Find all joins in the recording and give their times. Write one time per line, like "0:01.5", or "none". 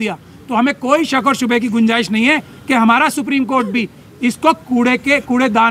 none